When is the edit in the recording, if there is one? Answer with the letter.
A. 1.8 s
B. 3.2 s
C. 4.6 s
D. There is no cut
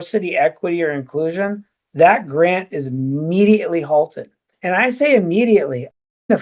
C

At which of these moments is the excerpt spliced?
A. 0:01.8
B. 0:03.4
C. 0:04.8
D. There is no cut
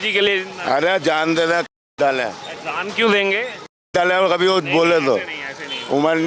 D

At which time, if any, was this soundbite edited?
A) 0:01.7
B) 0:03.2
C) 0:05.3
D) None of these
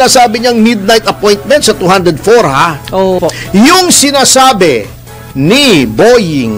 B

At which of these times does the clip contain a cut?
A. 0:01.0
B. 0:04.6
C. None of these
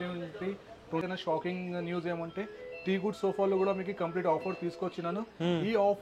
A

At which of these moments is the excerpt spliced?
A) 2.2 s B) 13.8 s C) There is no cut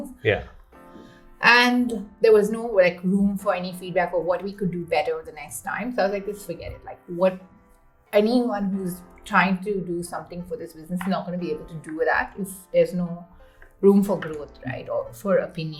C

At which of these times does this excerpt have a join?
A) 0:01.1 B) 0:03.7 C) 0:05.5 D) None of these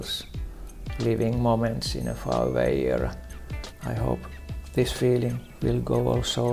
C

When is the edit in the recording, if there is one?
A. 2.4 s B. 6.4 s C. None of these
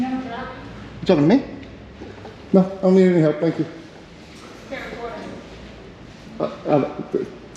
C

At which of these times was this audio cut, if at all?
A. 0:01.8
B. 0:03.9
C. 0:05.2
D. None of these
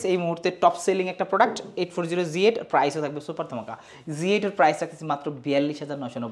D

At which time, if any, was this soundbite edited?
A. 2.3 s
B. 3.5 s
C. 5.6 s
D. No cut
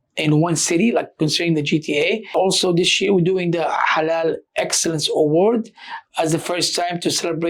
A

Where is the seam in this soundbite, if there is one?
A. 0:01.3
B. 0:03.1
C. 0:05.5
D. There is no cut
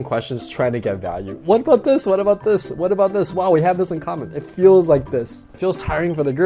C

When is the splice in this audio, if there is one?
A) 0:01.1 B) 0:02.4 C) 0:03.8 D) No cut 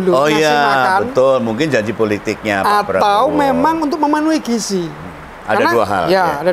D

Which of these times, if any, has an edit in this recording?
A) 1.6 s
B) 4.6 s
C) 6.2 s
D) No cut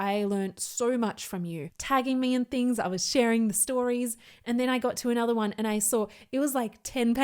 A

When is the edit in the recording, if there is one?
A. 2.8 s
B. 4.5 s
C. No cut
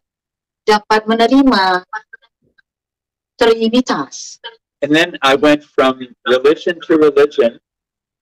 C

